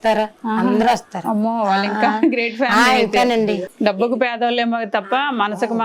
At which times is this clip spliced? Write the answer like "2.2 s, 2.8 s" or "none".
3.7 s